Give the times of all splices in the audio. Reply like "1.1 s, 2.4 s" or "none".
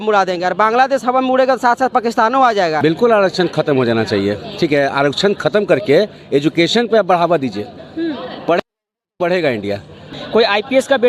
2.8 s, 10.1 s